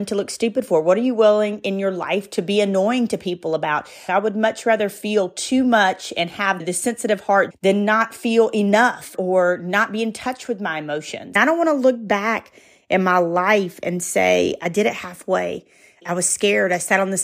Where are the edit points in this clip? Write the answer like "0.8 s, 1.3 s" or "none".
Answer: 4.1 s, 9.1 s, 11.4 s, 16.0 s

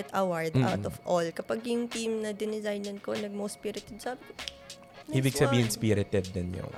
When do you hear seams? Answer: none

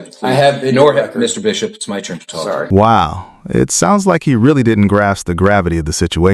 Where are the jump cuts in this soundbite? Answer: none

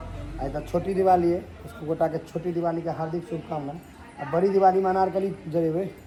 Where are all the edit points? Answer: none

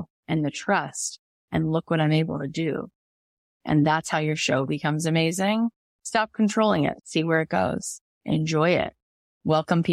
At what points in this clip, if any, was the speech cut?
5.9 s, 7.0 s

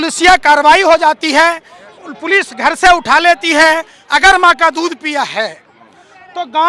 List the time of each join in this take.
3.9 s

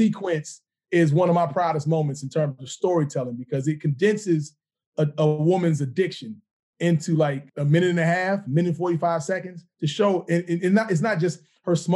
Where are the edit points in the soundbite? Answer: 7.5 s

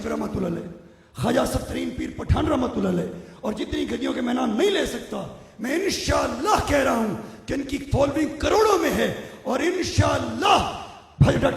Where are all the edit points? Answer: none

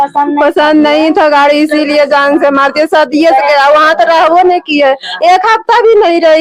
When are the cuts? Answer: none

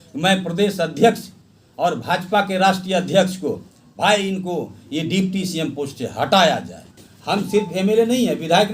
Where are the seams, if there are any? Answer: 6.8 s

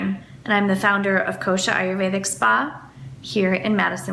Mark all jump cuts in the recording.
none

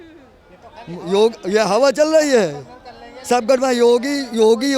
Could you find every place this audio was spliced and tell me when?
none

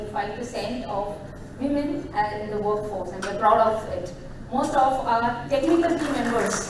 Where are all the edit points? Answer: none

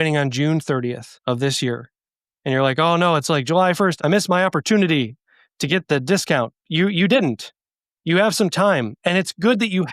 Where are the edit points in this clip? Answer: 1.1 s, 3.9 s, 6.6 s

